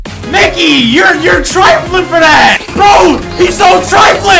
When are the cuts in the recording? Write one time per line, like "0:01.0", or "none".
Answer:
0:02.6